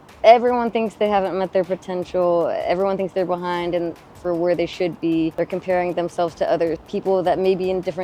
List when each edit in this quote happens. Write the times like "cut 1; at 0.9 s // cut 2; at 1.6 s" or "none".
cut 1; at 5.3 s // cut 2; at 6.9 s